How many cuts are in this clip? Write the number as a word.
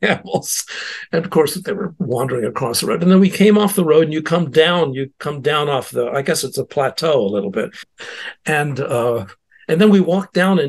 one